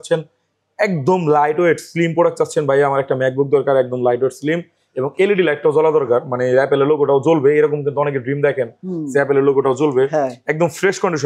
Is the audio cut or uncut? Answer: uncut